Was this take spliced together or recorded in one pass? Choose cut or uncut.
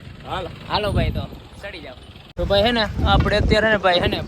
cut